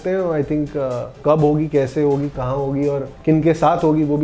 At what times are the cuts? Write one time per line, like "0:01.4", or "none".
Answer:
0:01.2
0:03.1